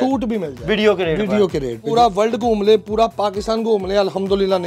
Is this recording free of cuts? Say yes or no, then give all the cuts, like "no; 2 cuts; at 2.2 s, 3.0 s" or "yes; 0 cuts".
no; 1 cut; at 1.8 s